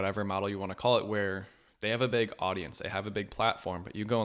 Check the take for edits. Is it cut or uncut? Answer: uncut